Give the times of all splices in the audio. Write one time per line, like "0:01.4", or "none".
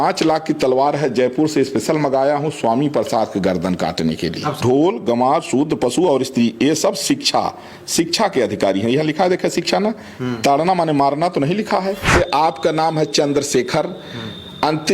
0:04.6
0:12.1